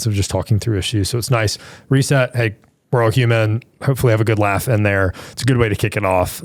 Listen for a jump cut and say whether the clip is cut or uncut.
uncut